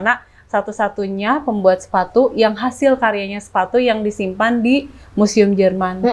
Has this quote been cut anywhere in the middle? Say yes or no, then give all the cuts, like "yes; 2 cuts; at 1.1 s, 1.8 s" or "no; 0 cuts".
no; 0 cuts